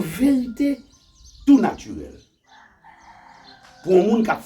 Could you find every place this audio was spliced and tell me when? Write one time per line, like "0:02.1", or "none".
none